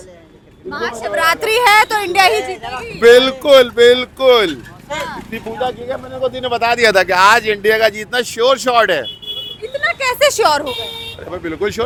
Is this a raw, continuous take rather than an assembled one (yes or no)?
yes